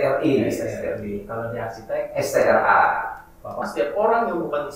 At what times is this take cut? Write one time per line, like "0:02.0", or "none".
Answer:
0:03.6